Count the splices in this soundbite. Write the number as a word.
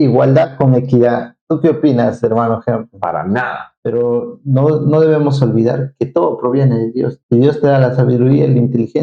one